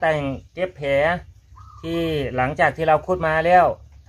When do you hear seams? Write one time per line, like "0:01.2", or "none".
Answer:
none